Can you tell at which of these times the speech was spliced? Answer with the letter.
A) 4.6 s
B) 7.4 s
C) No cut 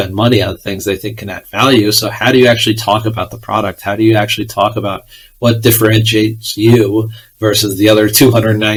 C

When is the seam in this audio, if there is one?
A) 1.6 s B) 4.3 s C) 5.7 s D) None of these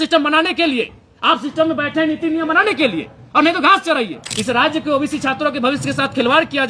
B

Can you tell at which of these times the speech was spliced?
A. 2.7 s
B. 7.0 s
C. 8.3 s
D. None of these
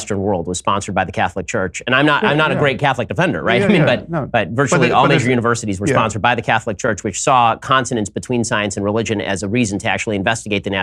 D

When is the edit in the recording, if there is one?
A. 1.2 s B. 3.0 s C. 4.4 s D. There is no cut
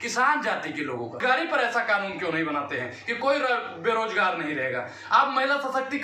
A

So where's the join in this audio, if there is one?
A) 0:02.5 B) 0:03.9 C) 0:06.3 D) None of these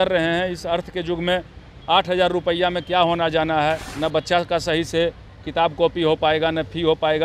B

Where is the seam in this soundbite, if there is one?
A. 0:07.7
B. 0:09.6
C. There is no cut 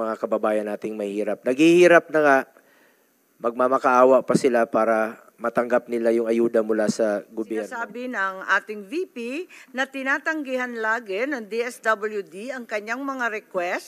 A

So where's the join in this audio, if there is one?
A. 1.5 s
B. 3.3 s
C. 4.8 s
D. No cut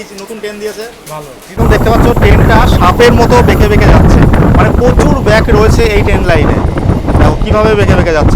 A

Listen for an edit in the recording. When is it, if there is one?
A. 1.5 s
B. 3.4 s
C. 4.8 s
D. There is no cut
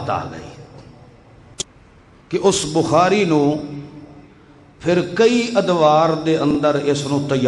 A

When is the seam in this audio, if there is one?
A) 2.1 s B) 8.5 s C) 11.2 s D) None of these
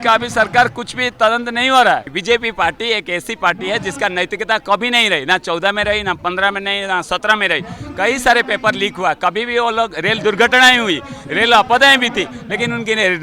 A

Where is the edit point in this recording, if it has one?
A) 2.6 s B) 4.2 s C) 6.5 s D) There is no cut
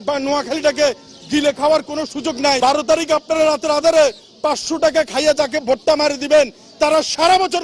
A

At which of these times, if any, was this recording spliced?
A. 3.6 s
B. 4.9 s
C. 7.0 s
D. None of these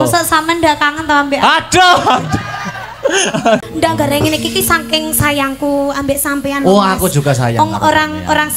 A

